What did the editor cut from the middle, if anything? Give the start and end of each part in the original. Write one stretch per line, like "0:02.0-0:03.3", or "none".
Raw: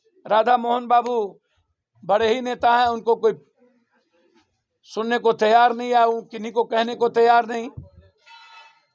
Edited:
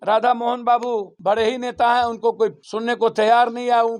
0:01.3-0:01.9
0:03.5-0:04.9

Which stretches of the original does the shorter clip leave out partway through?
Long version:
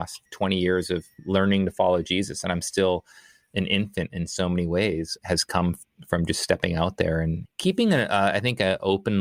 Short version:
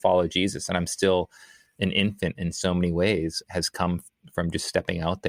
none

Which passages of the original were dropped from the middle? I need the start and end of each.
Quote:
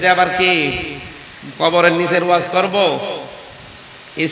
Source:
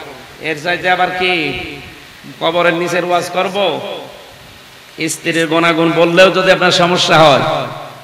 none

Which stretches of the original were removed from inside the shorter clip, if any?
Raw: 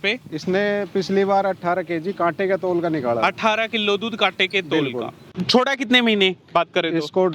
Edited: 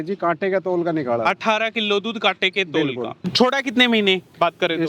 0:05.2-0:05.3

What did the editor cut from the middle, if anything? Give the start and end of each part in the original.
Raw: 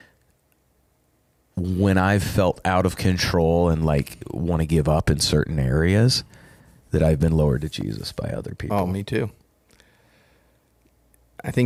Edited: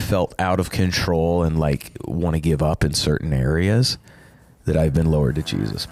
none

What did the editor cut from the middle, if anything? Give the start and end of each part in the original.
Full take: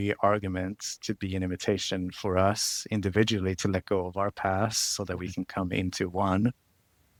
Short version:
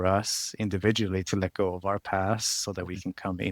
none

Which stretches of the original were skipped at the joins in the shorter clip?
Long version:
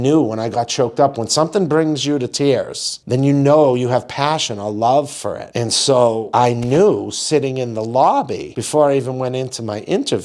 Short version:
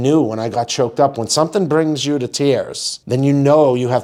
none

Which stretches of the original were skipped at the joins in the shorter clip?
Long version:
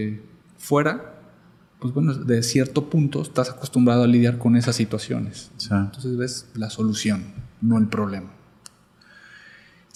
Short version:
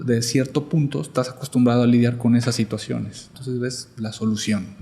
0:05.6-0:05.9

